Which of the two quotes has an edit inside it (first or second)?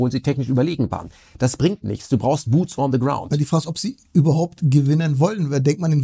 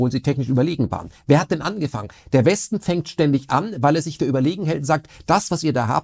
second